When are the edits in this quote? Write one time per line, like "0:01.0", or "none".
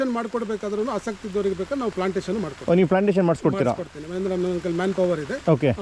none